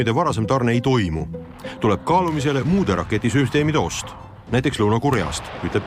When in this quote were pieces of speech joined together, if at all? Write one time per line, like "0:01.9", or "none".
none